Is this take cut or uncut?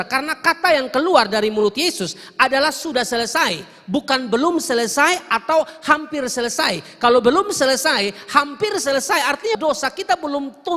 cut